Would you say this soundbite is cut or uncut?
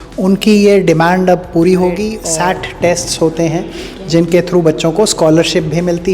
cut